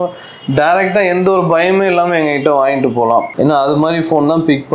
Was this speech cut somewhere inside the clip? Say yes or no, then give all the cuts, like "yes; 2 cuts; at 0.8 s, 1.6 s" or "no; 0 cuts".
no; 0 cuts